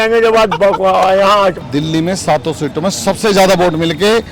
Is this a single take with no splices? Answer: no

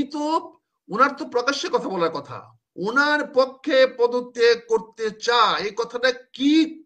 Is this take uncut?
yes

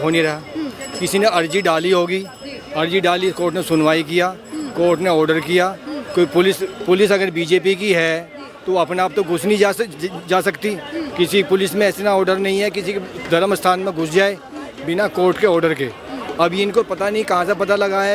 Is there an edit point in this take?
no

